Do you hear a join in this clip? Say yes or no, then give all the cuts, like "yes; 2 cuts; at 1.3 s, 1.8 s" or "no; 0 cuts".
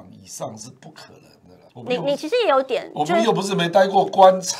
yes; 1 cut; at 1.5 s